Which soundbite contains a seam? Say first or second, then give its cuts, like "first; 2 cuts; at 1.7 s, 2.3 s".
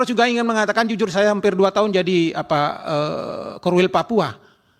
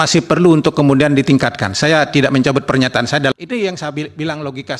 second; 1 cut; at 3.3 s